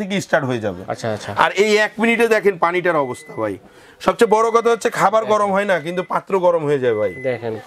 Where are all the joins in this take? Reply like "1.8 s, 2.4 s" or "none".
none